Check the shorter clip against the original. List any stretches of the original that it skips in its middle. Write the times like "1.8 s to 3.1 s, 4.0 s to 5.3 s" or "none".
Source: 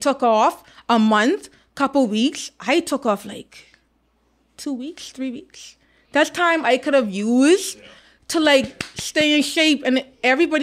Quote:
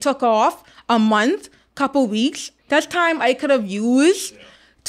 2.5 s to 5.9 s